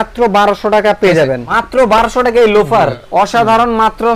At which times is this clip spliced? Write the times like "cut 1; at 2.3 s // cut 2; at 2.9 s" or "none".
cut 1; at 1.4 s // cut 2; at 3.1 s